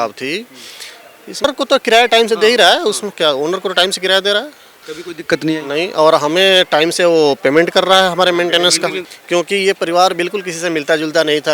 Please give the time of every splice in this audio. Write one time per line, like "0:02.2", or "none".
0:01.4
0:09.1

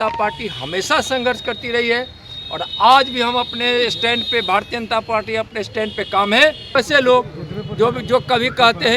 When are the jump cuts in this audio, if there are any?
0:06.8

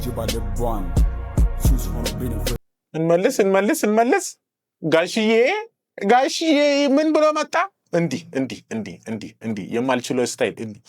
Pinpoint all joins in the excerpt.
0:02.5

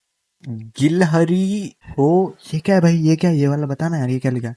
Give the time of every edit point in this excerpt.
0:01.8

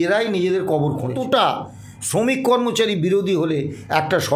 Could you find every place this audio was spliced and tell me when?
0:01.1

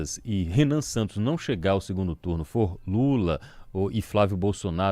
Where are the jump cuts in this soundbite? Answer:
none

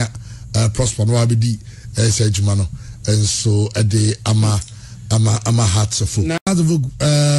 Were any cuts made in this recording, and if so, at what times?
0:06.4

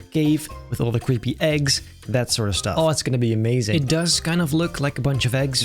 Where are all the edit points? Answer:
0:03.7

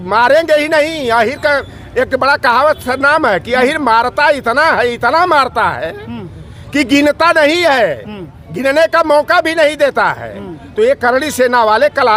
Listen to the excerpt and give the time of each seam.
none

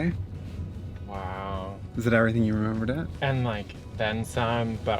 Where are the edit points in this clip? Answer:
0:03.1

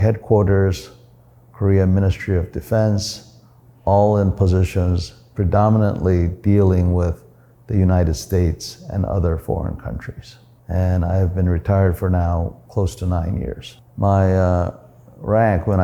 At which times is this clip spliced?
none

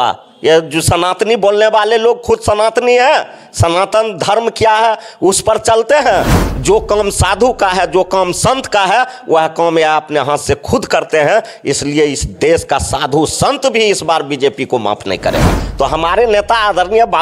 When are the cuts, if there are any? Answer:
0:06.5
0:15.5

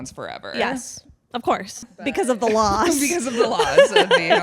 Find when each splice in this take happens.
0:02.1

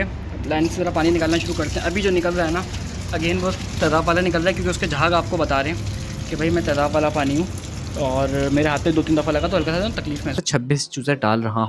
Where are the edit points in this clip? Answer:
0:10.4

